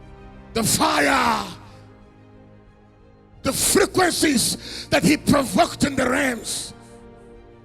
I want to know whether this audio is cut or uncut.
cut